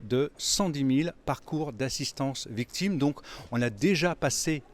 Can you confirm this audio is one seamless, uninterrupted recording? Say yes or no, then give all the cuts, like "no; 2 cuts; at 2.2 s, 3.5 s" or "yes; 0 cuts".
yes; 0 cuts